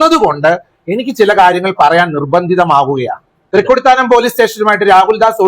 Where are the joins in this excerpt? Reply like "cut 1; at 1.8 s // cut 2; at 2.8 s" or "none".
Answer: cut 1; at 3.4 s